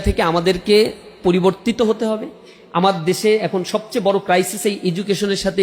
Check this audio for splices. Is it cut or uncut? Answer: cut